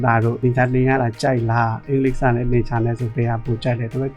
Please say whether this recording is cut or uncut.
cut